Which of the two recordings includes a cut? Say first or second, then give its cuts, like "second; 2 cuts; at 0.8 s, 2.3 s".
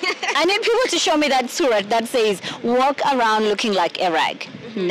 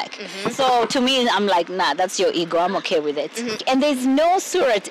second; 1 cut; at 3.6 s